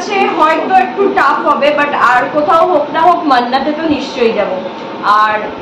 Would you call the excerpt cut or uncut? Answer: uncut